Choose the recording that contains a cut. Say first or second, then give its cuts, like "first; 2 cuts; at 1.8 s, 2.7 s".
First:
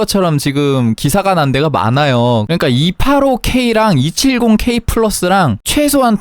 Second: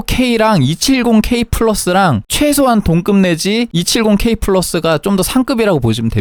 first; 1 cut; at 2.5 s